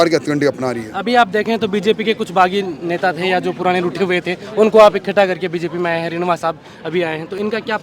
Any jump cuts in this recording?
no; 0 cuts

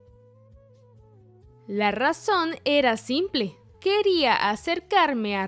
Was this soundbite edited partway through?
yes; 1 cut; at 1.1 s

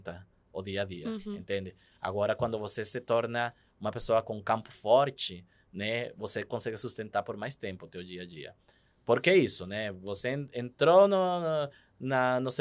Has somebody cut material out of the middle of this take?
no; 0 cuts

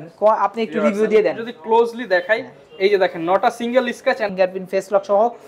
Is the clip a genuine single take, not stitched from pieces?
no; 1 cut; at 4.3 s

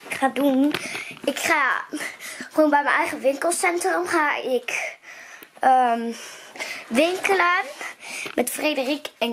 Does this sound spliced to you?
no; 0 cuts

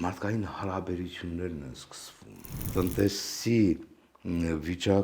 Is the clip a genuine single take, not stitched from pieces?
no; 1 cut; at 2.6 s

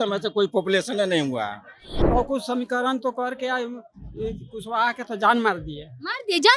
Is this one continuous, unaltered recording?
no; 1 cut; at 1.9 s

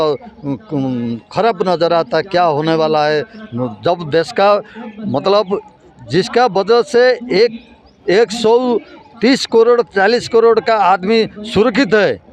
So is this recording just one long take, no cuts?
yes; 0 cuts

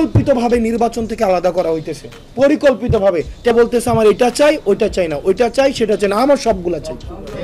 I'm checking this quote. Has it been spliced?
yes; 1 cut; at 3.5 s

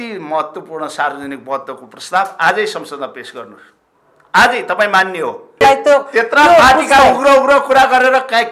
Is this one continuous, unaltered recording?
no; 1 cut; at 5.6 s

